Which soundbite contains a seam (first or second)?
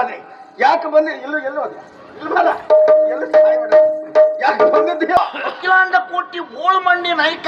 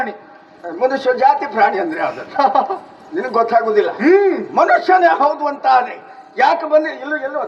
first